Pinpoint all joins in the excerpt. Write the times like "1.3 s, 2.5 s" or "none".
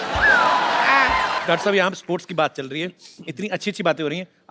1.4 s